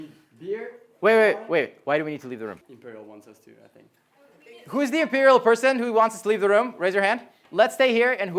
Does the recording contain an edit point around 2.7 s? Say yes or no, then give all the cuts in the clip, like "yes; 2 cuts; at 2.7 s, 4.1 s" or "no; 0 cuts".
yes; 1 cut; at 2.7 s